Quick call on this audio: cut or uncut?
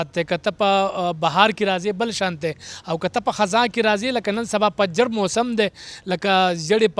uncut